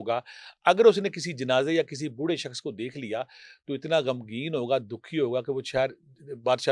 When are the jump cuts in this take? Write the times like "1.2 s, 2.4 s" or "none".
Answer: none